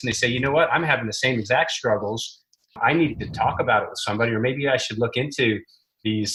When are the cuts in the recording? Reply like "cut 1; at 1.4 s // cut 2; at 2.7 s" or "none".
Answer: none